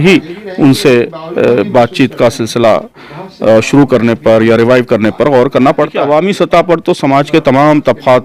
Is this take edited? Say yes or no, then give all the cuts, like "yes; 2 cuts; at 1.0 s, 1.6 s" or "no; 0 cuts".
yes; 1 cut; at 6.0 s